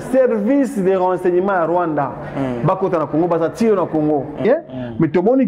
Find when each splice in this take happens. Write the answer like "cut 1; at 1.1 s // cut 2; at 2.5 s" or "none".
cut 1; at 4.5 s